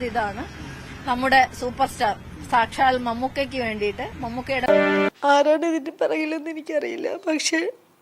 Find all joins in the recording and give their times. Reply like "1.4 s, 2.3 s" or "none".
4.7 s